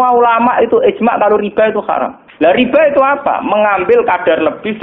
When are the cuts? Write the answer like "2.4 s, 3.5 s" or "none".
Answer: 2.2 s